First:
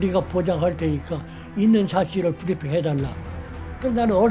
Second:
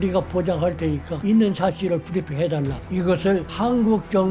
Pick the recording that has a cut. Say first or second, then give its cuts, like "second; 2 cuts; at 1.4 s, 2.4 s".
second; 3 cuts; at 1.1 s, 2.8 s, 3.5 s